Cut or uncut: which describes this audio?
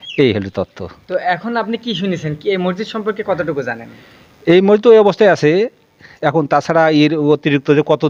uncut